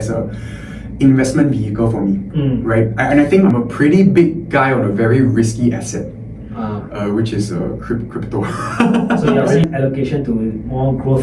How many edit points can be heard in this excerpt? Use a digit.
2